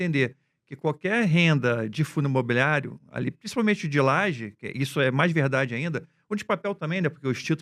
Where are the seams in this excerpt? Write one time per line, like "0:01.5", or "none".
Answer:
none